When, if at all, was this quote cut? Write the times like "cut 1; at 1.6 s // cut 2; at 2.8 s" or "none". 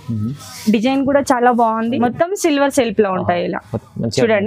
cut 1; at 2.0 s